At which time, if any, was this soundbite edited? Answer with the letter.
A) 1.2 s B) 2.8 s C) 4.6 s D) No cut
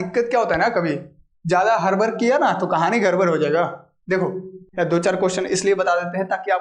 C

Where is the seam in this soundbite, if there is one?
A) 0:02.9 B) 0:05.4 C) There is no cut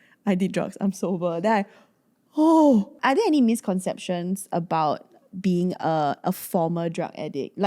A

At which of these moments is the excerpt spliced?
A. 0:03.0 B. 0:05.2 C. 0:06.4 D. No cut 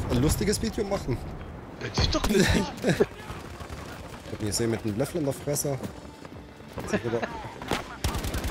A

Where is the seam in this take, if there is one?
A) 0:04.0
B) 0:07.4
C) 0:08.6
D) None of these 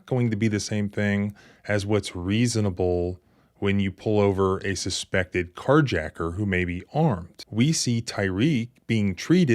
B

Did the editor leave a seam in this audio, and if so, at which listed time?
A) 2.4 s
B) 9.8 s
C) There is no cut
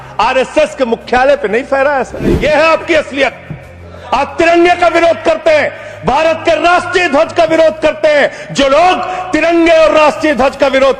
A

